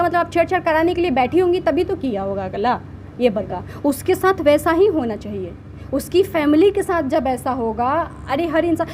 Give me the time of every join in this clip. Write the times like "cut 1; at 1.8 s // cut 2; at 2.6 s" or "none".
cut 1; at 3.4 s